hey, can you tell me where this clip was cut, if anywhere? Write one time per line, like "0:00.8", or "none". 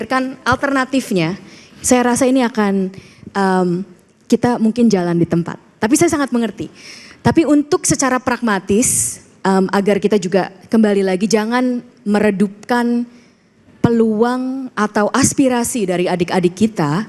none